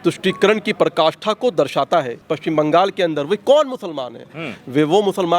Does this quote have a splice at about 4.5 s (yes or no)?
no